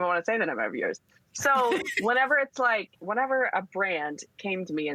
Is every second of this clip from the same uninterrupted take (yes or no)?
no